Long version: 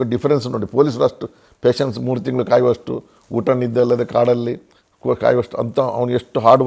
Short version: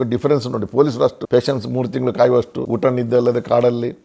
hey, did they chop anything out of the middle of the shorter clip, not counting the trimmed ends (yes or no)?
yes